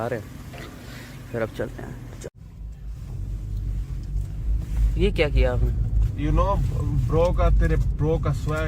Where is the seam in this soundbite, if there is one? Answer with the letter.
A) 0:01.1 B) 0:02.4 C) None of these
B